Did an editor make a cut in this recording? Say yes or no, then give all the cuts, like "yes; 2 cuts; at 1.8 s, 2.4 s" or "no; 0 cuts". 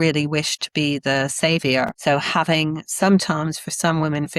yes; 1 cut; at 2.0 s